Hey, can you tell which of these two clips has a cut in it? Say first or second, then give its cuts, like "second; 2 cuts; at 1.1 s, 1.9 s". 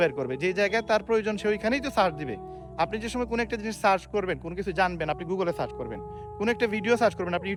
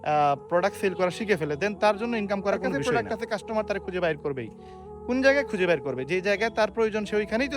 second; 1 cut; at 2.7 s